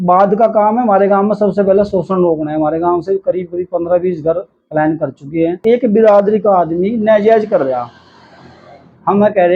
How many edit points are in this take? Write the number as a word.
one